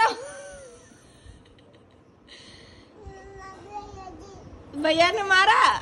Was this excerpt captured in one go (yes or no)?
yes